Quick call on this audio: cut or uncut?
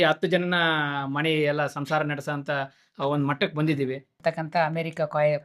cut